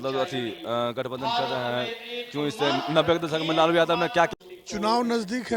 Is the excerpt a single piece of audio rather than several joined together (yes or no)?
no